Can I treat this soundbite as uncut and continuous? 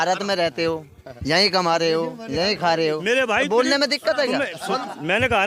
yes; 0 cuts

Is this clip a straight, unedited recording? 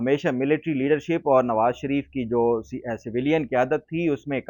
yes; 0 cuts

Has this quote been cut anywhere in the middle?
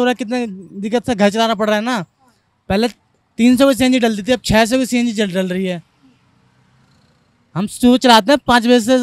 no; 0 cuts

